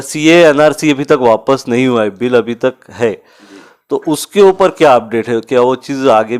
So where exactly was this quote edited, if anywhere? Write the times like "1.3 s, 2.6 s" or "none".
none